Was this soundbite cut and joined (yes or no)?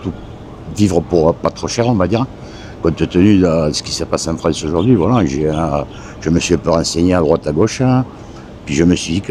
no